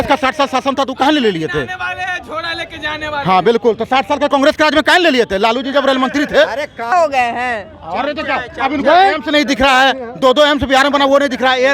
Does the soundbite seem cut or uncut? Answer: cut